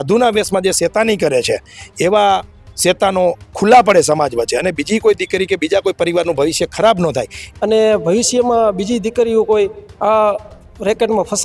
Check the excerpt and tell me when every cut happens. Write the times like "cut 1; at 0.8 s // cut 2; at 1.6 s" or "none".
cut 1; at 7.4 s